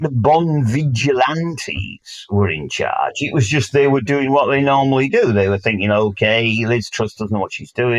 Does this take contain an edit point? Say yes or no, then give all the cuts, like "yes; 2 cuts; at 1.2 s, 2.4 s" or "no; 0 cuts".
no; 0 cuts